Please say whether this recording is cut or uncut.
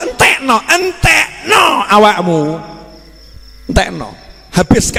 uncut